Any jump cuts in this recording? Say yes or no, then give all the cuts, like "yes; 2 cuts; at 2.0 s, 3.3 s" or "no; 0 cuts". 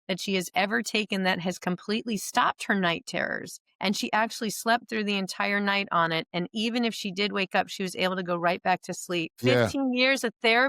yes; 1 cut; at 9.4 s